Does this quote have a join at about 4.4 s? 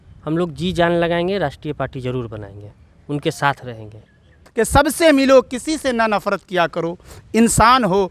yes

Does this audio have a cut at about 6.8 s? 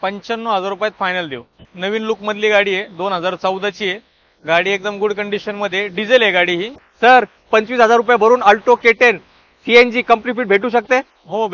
yes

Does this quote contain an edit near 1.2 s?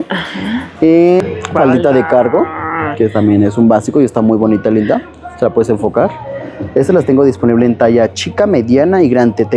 yes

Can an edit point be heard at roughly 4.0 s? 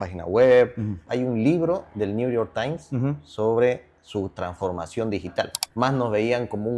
no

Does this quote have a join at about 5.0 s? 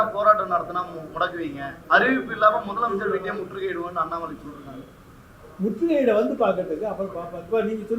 no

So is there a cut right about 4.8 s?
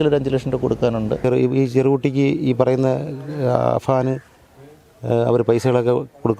no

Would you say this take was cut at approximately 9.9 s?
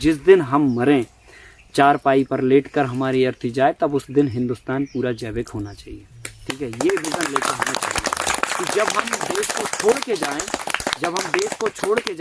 no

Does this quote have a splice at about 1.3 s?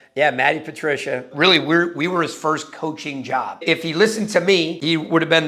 yes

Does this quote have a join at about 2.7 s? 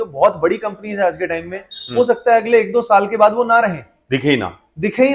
no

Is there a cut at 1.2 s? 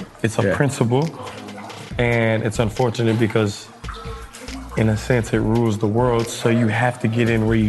no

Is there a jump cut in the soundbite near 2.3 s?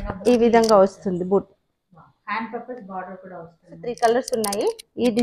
no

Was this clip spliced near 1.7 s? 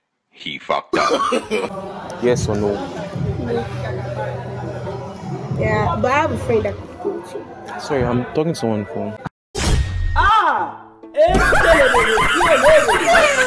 yes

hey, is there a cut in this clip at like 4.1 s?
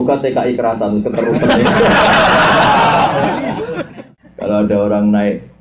yes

